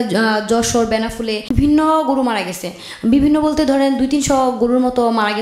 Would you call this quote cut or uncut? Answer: cut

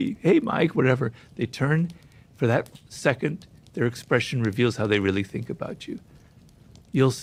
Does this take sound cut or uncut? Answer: uncut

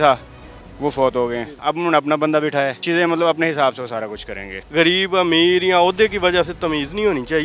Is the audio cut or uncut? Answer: cut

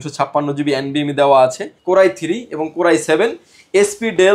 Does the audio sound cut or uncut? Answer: cut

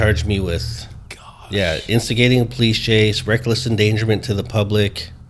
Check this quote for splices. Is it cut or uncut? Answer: uncut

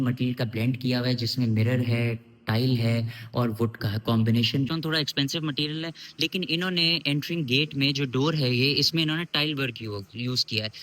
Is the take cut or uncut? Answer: cut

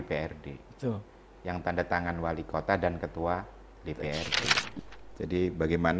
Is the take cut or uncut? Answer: cut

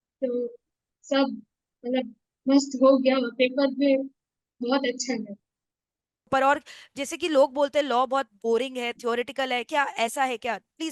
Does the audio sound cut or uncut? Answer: cut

